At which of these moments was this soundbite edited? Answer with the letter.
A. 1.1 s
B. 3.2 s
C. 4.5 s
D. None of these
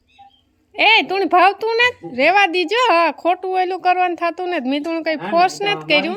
D